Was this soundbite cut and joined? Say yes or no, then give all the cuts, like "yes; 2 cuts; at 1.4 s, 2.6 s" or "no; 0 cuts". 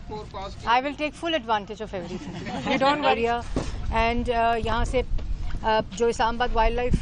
yes; 1 cut; at 3.2 s